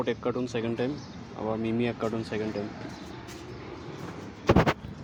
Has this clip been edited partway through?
no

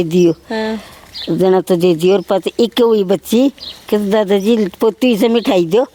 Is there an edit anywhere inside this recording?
no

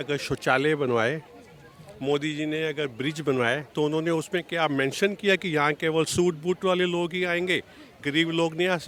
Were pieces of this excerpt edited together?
no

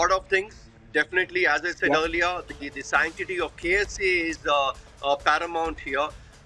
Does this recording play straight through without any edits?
yes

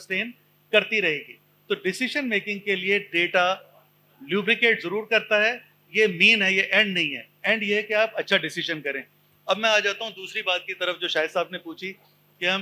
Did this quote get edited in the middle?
no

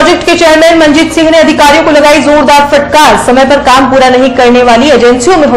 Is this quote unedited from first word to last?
yes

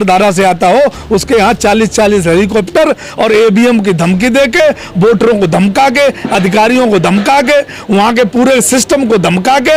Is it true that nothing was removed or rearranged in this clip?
yes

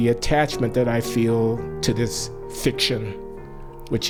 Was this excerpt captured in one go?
yes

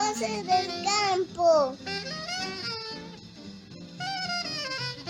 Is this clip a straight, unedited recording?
no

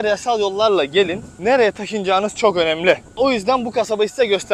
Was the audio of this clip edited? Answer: yes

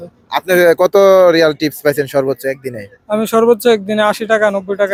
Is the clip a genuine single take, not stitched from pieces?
yes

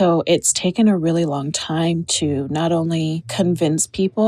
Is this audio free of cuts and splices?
yes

